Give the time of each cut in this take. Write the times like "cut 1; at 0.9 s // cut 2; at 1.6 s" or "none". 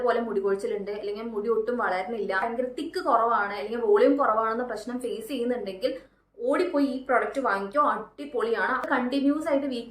cut 1; at 2.4 s // cut 2; at 8.8 s